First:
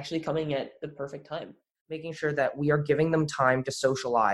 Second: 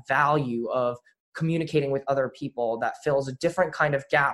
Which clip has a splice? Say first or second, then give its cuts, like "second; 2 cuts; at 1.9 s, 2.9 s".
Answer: first; 1 cut; at 2.0 s